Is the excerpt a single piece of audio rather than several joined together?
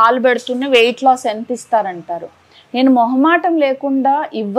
yes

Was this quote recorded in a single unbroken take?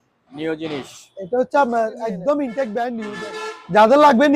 no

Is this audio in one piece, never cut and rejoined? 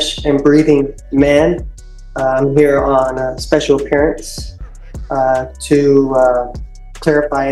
yes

